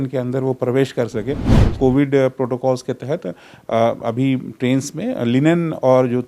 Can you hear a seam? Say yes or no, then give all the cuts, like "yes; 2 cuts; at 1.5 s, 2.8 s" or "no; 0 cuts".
yes; 1 cut; at 1.6 s